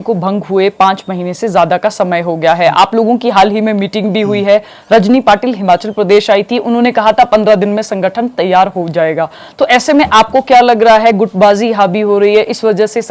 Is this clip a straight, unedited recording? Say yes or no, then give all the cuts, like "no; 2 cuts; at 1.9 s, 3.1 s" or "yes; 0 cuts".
yes; 0 cuts